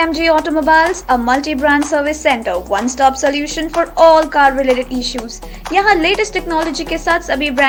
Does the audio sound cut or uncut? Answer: uncut